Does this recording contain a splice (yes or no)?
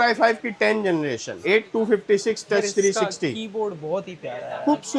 no